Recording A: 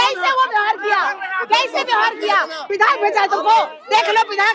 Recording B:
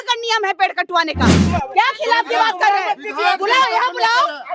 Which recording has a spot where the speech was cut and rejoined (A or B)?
B